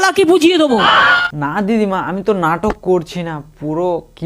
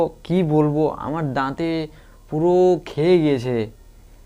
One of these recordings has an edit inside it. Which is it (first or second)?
first